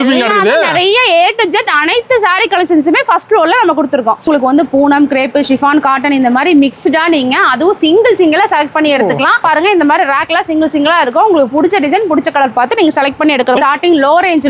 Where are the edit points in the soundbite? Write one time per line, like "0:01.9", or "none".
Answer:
0:04.3
0:09.4
0:13.6